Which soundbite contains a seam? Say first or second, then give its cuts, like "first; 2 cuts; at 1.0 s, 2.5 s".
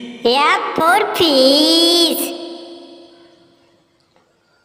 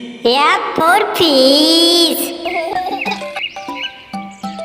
second; 1 cut; at 2.2 s